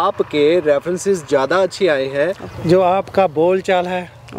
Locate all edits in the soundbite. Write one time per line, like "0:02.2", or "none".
0:02.5